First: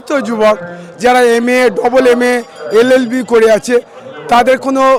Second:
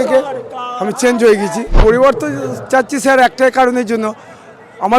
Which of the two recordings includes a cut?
second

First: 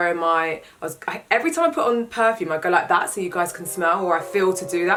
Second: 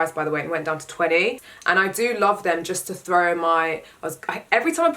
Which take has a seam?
second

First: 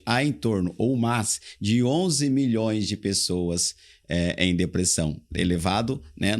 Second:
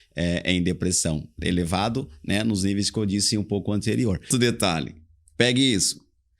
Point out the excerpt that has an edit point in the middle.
second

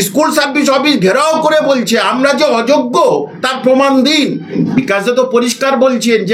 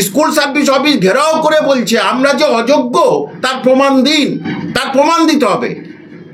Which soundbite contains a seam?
first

